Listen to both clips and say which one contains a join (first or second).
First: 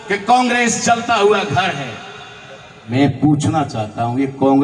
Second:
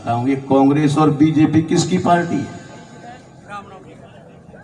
first